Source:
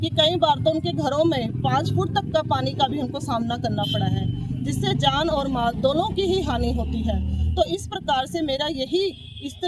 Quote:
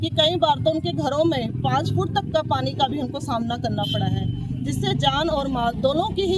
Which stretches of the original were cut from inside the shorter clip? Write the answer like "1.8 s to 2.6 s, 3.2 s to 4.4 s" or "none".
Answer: none